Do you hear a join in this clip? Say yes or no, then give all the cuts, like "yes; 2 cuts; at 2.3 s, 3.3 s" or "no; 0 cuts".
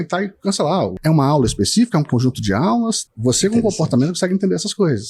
yes; 2 cuts; at 1.0 s, 3.0 s